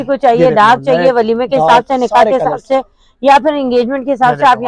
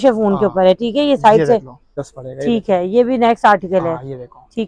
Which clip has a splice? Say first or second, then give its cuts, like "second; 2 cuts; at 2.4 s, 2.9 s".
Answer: second; 1 cut; at 2.0 s